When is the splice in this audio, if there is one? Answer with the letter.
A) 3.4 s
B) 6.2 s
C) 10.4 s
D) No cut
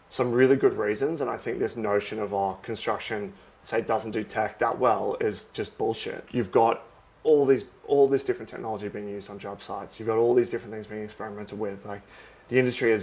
B